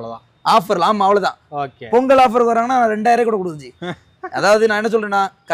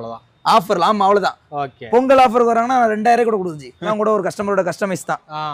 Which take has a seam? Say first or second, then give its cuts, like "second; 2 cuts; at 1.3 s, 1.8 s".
second; 1 cut; at 3.9 s